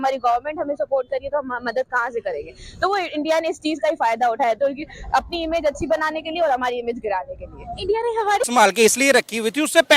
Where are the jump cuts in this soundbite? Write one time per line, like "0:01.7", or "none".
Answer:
0:08.5